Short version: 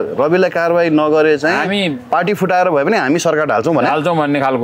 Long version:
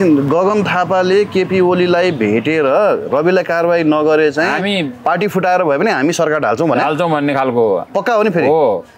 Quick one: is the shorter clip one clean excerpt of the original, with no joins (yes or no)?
yes